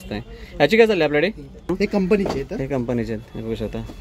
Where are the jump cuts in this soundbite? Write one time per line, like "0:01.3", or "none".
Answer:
0:01.7